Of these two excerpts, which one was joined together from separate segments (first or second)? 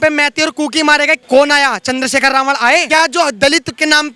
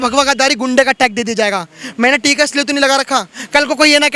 first